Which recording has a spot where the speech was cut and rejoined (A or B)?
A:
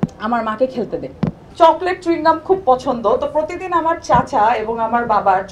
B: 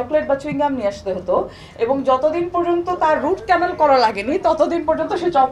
A